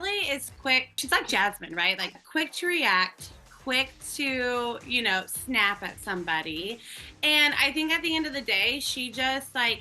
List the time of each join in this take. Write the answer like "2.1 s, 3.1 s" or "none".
1.0 s

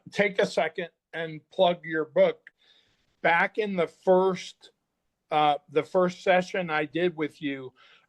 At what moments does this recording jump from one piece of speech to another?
2.5 s

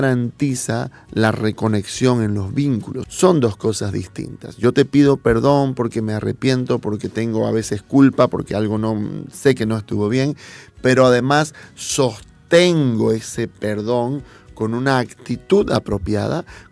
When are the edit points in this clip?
3.0 s

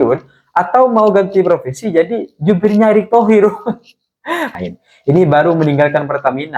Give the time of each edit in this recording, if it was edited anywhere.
4.5 s

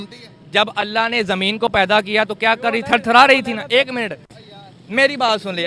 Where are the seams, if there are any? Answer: none

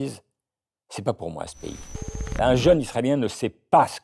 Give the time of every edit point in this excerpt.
2.3 s

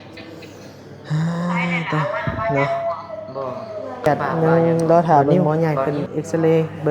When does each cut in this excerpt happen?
4.1 s

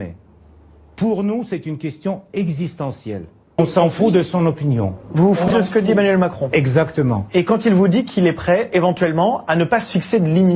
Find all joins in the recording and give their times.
3.6 s, 5.5 s

